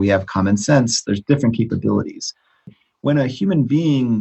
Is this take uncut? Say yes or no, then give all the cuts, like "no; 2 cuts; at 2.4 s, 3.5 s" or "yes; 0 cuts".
no; 1 cut; at 2.8 s